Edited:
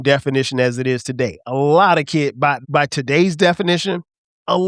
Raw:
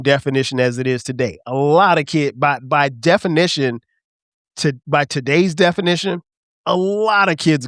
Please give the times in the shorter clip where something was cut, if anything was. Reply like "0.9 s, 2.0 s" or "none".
2.6 s